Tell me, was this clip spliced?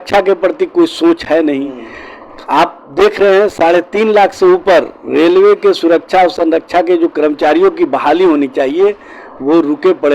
no; 0 cuts

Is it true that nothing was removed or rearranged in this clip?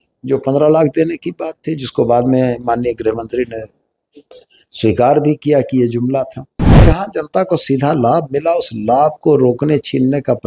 no; 1 cut; at 6.7 s

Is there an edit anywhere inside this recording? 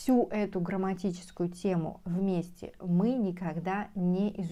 no; 0 cuts

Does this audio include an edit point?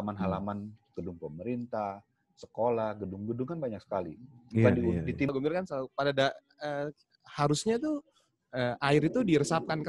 yes; 1 cut; at 5.3 s

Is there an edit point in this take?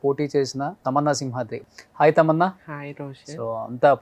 yes; 2 cuts; at 0.8 s, 1.6 s

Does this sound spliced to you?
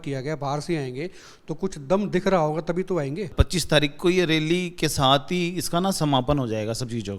yes; 1 cut; at 3.4 s

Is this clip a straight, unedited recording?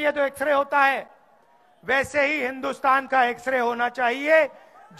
yes; 0 cuts

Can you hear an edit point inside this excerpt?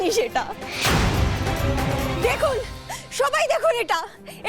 yes; 1 cut; at 1.9 s

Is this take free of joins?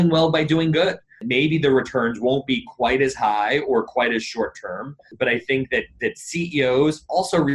no; 2 cuts; at 1.2 s, 5.0 s

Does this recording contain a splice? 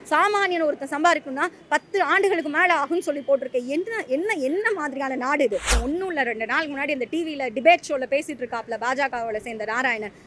yes; 1 cut; at 5.8 s

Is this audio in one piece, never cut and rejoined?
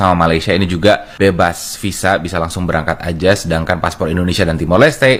yes; 0 cuts

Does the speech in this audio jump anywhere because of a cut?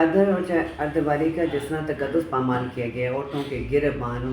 no; 0 cuts

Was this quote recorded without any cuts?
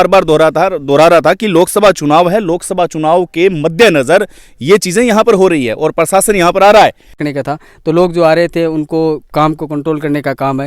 no; 1 cut; at 7.2 s

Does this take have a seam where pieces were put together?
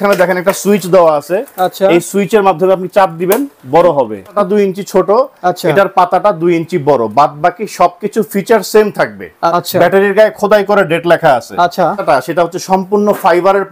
yes; 3 cuts; at 4.3 s, 9.5 s, 12.0 s

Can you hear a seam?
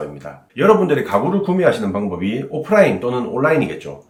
no; 0 cuts

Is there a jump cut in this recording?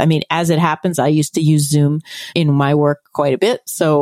yes; 1 cut; at 2.3 s

